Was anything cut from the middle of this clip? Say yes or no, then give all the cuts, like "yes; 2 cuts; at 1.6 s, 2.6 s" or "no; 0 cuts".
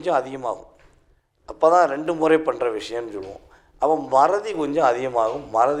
no; 0 cuts